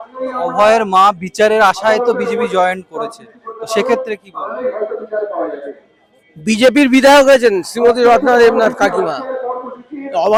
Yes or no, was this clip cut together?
no